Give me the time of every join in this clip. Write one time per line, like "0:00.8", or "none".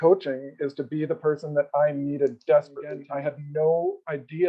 0:03.0